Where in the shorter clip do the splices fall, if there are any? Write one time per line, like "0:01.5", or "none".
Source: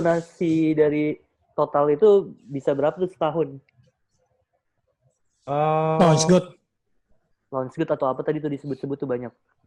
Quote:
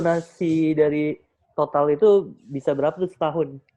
none